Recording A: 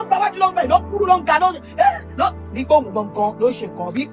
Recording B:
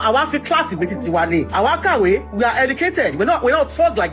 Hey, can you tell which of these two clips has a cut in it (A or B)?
B